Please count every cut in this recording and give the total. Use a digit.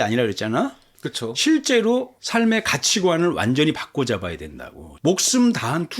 1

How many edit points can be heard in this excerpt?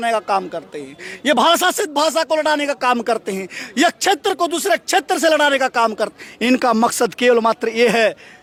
0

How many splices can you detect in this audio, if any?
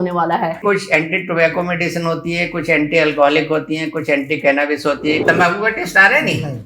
1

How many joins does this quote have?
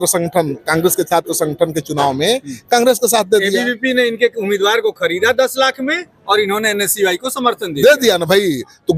0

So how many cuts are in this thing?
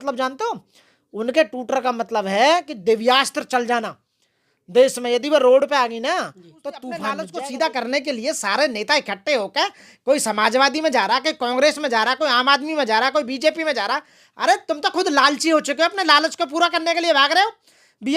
1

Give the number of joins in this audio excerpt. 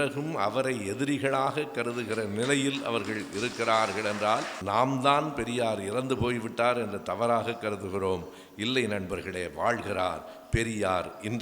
1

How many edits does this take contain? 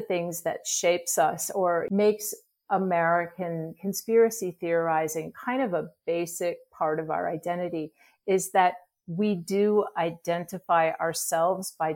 1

